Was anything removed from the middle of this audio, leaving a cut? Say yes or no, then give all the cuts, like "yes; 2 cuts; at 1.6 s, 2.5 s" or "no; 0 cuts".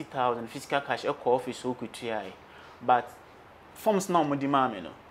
no; 0 cuts